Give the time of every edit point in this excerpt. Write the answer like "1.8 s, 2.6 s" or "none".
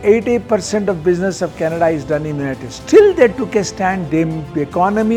none